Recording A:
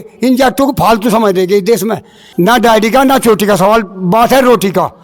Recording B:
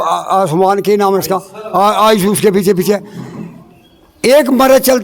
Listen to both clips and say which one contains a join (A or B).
A